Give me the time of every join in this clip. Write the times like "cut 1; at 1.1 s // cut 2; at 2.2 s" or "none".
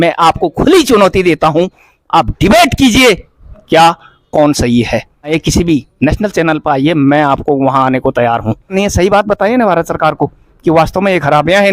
cut 1; at 5.4 s // cut 2; at 8.7 s

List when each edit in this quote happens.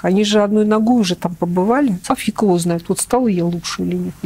cut 1; at 2.0 s

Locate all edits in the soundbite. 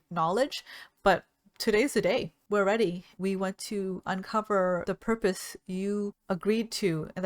cut 1; at 2.4 s // cut 2; at 3.1 s // cut 3; at 4.8 s // cut 4; at 6.2 s

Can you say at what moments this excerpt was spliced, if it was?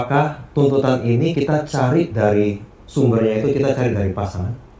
none

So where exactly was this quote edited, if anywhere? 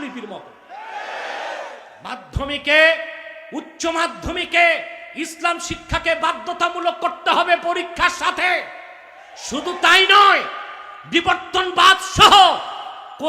cut 1; at 1.9 s

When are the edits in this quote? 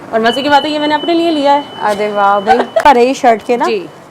cut 1; at 2.8 s

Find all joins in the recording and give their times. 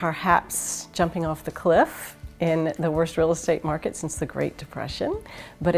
none

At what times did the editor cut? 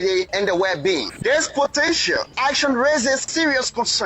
cut 1; at 1.1 s

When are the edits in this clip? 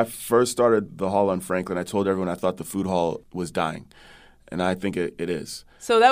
cut 1; at 0.9 s

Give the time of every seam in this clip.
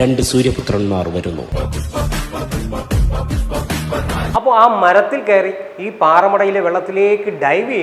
cut 1; at 1.4 s // cut 2; at 4.2 s

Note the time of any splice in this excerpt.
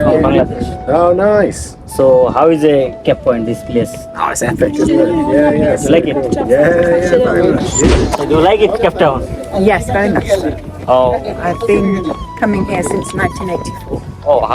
cut 1; at 7.9 s

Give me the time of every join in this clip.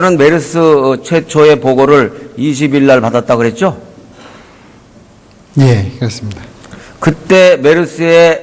cut 1; at 2.7 s

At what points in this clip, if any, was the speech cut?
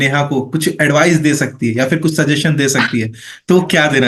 none

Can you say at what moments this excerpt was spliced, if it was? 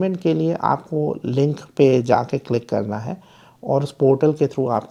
none

